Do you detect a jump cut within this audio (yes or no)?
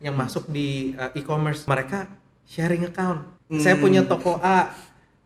yes